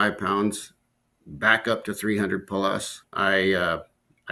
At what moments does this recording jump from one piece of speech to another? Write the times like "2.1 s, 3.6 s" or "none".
3.0 s